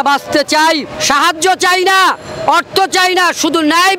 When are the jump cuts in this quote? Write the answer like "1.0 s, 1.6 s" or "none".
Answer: 0.9 s

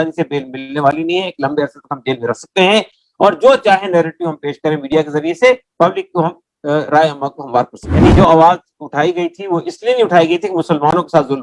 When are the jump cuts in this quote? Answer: 8.0 s

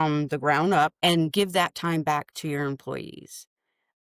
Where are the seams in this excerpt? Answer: 0.9 s

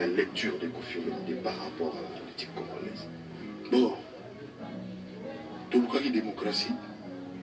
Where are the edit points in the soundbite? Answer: none

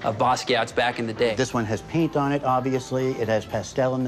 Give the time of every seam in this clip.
1.3 s

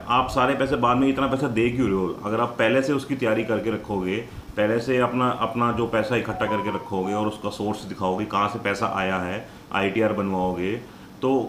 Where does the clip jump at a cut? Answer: none

